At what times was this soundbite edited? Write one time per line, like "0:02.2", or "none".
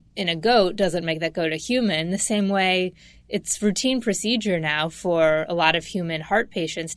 none